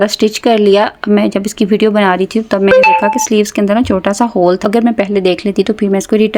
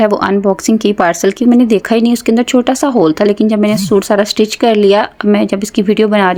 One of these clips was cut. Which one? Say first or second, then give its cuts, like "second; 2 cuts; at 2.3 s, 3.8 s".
first; 1 cut; at 4.6 s